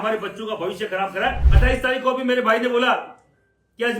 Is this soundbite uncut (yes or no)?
no